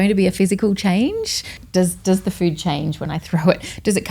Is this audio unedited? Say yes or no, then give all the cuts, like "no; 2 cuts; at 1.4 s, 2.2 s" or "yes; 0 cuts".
no; 1 cut; at 1.6 s